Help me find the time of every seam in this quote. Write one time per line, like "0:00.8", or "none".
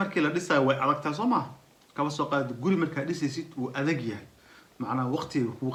none